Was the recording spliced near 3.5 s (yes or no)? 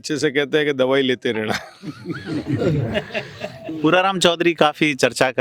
no